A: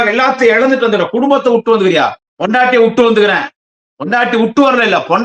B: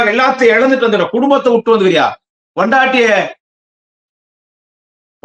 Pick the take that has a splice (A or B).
A